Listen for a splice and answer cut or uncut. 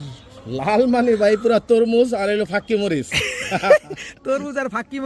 uncut